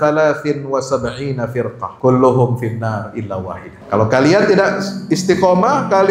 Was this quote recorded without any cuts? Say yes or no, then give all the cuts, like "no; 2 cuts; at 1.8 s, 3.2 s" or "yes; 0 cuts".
no; 2 cuts; at 1.9 s, 3.7 s